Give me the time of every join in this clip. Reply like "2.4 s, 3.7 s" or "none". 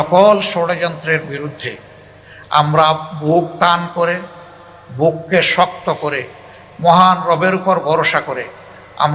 none